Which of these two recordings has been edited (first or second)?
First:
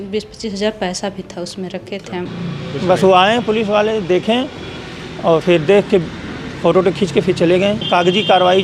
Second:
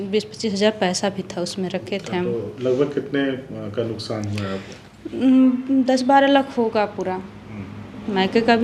first